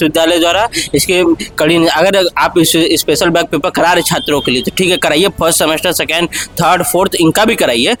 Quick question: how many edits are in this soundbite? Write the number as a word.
zero